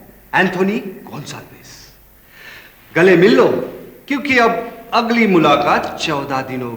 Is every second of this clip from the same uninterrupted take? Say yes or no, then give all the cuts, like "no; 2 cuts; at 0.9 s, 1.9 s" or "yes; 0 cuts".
yes; 0 cuts